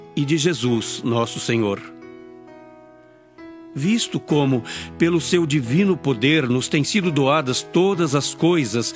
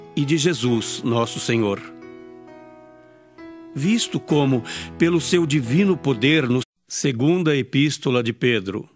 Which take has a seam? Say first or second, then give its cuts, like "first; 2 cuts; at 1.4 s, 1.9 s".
first; 1 cut; at 6.7 s